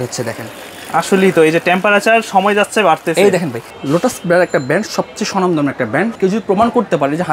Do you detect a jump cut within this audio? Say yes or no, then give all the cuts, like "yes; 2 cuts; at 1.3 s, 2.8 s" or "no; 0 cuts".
yes; 2 cuts; at 3.7 s, 6.1 s